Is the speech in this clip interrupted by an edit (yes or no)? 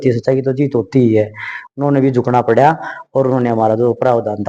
no